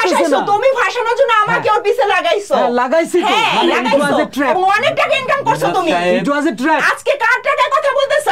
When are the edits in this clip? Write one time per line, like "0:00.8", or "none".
none